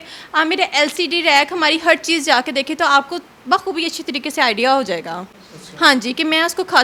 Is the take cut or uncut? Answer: uncut